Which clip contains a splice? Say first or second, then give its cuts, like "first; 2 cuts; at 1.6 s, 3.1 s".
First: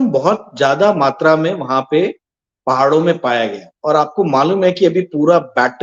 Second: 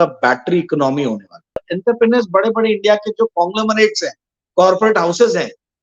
second; 1 cut; at 1.7 s